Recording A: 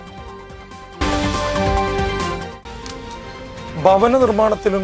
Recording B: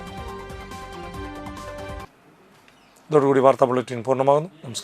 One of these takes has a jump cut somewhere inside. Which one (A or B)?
A